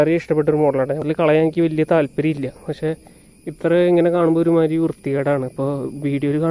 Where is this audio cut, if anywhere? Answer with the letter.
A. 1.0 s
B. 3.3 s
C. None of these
A